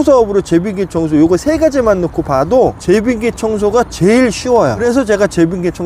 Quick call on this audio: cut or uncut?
cut